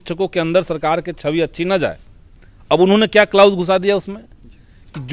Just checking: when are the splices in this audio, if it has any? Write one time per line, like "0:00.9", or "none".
none